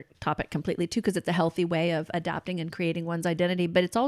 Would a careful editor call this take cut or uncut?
uncut